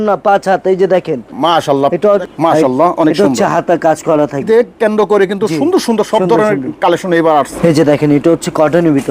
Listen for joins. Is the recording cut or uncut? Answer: cut